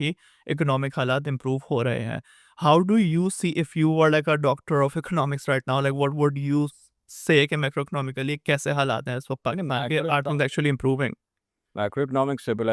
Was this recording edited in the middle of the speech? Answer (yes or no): no